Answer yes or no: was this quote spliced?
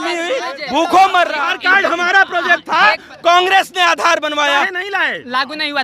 yes